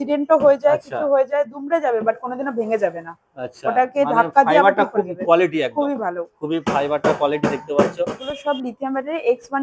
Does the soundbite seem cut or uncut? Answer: cut